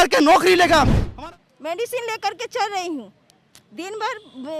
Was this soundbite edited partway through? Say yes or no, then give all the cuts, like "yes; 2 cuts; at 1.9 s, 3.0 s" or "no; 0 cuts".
yes; 1 cut; at 1.0 s